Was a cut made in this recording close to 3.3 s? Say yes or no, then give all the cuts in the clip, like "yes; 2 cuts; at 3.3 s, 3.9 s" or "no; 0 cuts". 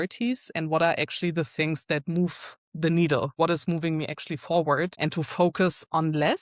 yes; 2 cuts; at 3.3 s, 4.9 s